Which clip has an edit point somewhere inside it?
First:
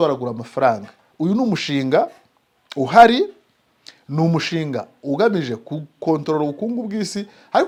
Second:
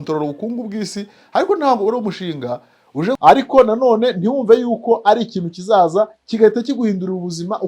second; 1 cut; at 3.2 s

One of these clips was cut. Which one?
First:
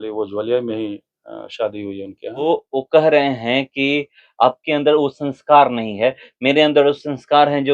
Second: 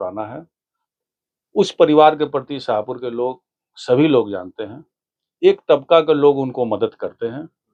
first; 1 cut; at 2.4 s

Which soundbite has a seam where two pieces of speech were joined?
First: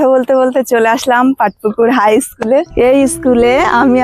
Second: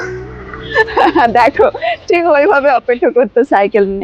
first; 1 cut; at 2.7 s

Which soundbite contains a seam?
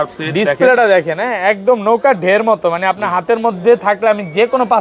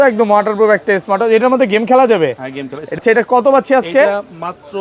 second; 1 cut; at 3.0 s

